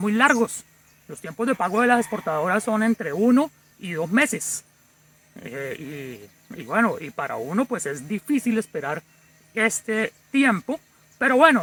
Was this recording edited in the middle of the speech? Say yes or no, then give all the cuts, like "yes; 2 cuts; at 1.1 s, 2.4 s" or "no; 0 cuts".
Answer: no; 0 cuts